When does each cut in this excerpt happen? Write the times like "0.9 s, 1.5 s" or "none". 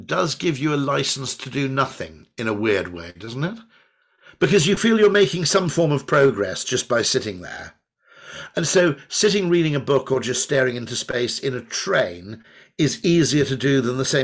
none

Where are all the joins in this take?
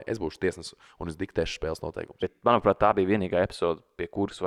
2.2 s

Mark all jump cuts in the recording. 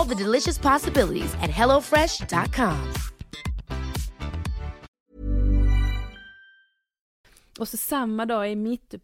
4.9 s, 7.1 s

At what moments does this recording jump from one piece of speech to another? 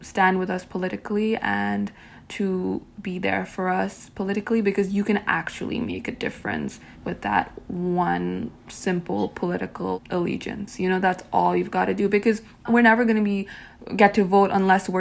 6.9 s, 10.0 s, 12.7 s

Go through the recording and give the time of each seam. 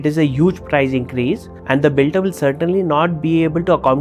none

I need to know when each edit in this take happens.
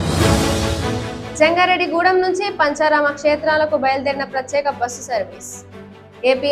1.2 s

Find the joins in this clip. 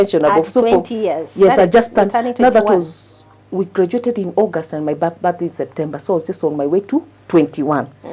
none

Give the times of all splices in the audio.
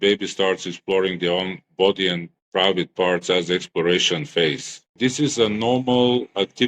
5.0 s

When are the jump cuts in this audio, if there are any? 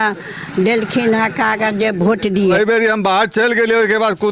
2.6 s

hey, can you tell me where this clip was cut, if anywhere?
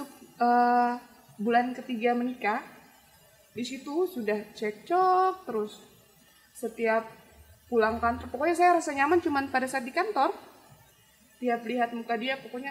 none

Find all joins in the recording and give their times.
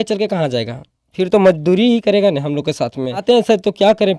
3.2 s

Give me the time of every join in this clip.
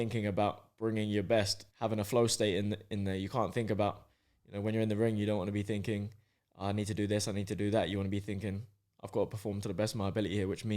1.6 s

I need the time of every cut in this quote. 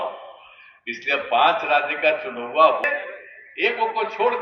2.9 s

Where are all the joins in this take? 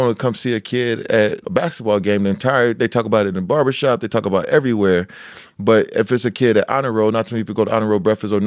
1.4 s

